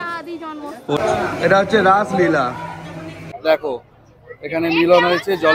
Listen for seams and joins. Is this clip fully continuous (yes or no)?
no